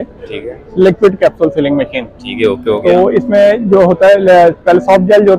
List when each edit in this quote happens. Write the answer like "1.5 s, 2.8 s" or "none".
none